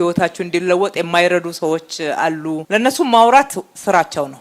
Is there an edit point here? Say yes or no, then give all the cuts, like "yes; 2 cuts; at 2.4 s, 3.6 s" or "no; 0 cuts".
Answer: yes; 1 cut; at 2.6 s